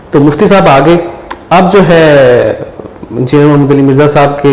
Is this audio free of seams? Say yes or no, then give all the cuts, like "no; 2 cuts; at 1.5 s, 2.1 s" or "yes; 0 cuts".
yes; 0 cuts